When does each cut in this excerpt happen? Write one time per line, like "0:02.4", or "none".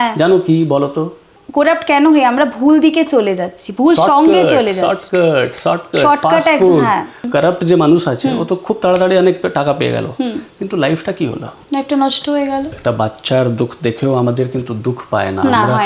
0:01.4
0:07.2
0:11.5
0:12.7